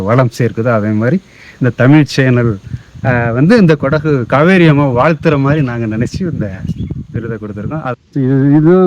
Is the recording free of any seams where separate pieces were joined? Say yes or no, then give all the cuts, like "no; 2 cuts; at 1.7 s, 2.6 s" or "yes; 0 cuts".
no; 1 cut; at 7.9 s